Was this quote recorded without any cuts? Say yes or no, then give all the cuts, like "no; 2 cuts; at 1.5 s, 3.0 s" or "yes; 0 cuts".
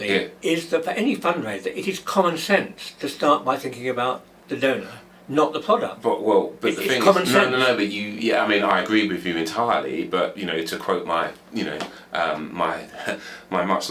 yes; 0 cuts